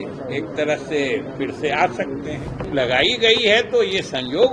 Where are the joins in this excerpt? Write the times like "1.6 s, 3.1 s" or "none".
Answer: 2.7 s